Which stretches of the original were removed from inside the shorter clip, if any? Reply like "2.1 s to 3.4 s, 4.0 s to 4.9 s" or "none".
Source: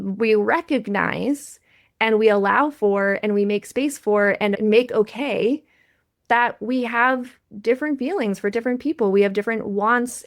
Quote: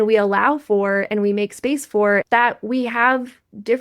4.4 s to 6.2 s